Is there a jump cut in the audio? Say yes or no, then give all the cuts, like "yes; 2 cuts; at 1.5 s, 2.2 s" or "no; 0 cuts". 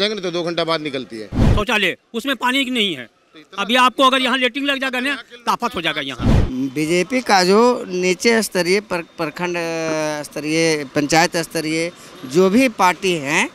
yes; 2 cuts; at 1.4 s, 6.3 s